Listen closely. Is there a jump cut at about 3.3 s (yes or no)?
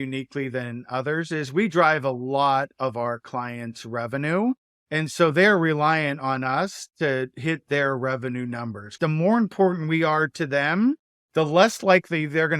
no